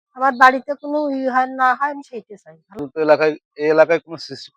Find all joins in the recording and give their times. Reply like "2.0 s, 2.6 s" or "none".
2.8 s